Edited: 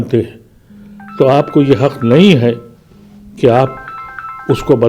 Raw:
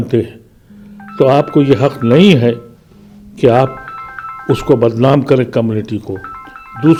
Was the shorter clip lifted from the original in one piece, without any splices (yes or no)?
yes